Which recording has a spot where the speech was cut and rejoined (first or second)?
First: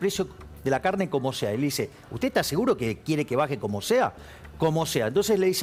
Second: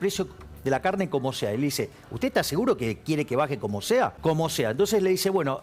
second